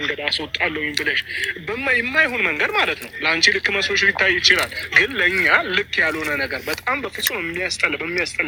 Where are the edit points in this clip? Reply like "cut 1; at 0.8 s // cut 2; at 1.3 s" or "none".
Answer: none